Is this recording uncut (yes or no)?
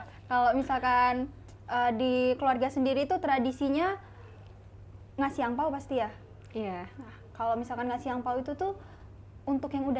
yes